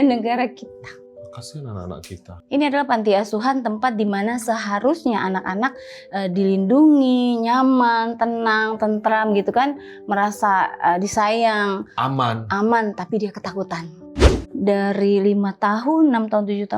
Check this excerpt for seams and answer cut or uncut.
cut